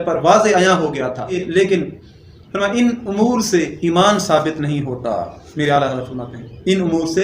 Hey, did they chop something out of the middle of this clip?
yes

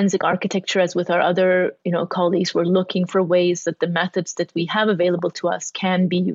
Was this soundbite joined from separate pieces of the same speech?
no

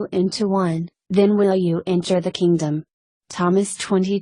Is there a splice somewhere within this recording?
yes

